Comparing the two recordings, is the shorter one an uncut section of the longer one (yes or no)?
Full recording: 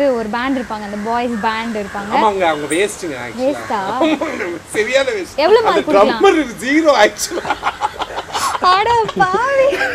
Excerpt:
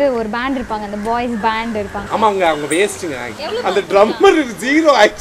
no